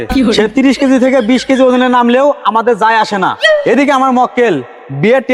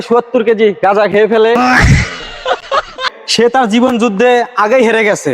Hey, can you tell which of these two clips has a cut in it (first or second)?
second